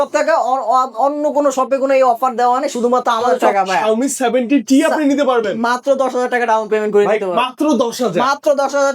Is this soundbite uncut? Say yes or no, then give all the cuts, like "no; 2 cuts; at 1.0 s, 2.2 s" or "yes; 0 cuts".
no; 1 cut; at 3.4 s